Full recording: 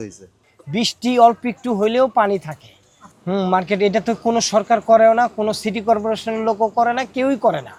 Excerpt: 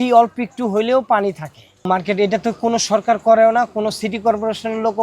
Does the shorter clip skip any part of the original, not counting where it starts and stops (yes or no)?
yes